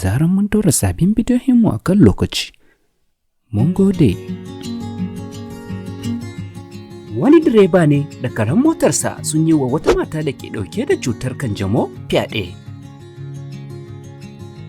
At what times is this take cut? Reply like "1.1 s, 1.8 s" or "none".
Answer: 4.2 s, 13.0 s